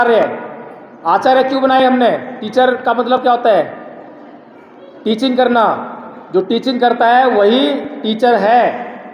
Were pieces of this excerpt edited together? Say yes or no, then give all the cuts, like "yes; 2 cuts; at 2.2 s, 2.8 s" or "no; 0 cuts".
yes; 1 cut; at 2.4 s